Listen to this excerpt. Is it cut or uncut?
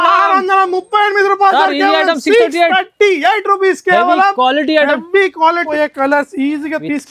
cut